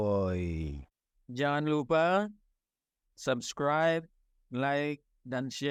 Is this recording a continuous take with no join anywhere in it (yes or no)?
yes